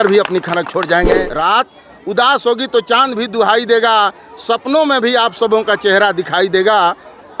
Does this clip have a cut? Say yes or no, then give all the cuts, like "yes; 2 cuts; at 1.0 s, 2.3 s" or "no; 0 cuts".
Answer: yes; 1 cut; at 1.2 s